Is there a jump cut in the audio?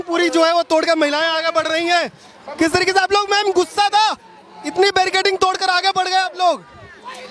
no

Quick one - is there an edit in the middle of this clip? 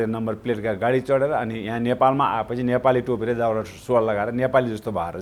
no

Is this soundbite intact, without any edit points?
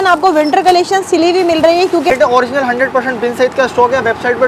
no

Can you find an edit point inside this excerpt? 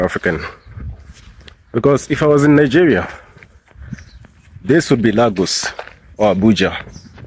no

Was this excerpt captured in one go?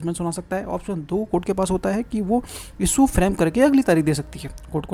yes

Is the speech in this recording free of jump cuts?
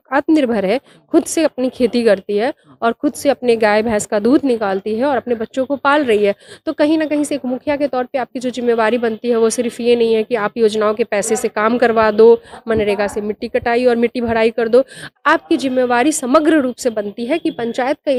yes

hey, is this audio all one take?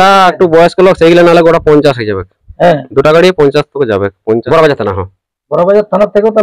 no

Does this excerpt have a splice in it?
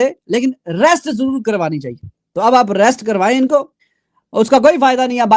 no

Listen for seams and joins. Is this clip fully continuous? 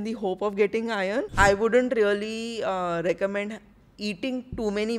no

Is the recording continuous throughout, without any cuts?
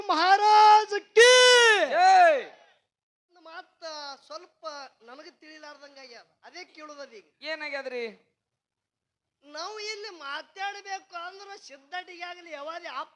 no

